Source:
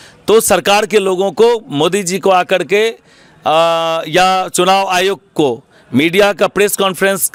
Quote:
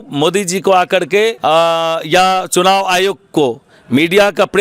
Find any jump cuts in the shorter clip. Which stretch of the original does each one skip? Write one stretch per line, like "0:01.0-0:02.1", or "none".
0:03.0-0:03.4